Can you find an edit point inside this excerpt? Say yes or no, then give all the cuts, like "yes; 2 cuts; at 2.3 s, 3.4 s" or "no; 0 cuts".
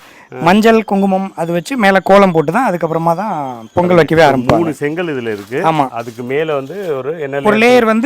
no; 0 cuts